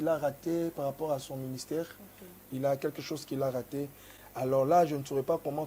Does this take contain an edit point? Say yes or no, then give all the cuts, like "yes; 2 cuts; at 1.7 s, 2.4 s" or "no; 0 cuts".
no; 0 cuts